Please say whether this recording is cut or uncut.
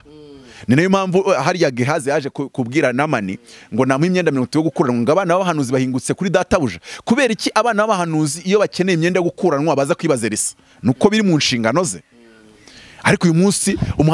uncut